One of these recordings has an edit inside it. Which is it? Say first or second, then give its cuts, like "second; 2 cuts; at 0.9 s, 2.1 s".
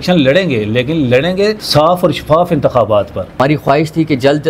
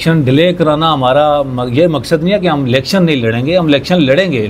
first; 2 cuts; at 1.6 s, 3.4 s